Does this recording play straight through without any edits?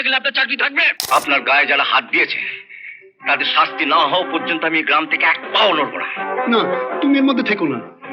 no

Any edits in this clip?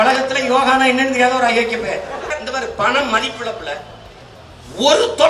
yes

